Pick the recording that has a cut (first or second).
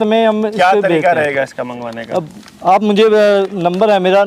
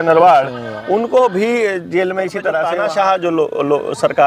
second